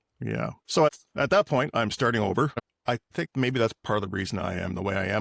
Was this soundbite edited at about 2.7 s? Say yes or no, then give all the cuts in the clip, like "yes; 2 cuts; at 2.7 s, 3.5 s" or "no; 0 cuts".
yes; 2 cuts; at 1.0 s, 2.7 s